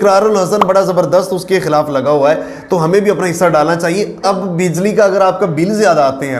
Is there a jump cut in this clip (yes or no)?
yes